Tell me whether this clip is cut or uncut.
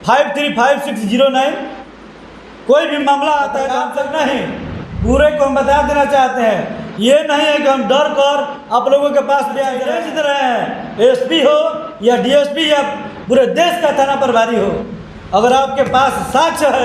cut